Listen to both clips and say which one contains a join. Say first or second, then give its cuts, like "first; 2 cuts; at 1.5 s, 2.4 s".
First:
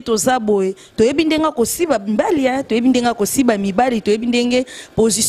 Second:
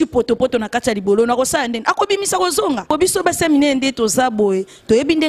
second; 1 cut; at 2.9 s